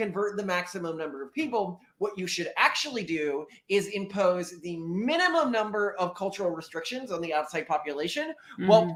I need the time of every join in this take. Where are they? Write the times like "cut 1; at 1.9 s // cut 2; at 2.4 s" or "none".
none